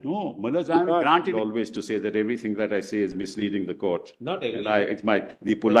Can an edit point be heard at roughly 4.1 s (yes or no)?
no